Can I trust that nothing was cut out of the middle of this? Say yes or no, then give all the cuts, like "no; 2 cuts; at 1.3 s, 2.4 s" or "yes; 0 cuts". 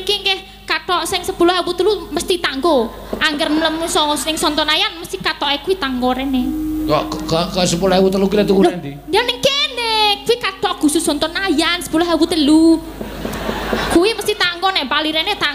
yes; 0 cuts